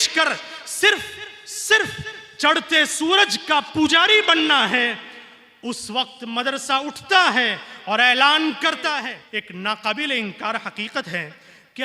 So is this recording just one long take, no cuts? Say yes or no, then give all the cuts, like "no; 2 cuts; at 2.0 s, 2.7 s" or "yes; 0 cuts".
no; 1 cut; at 9.1 s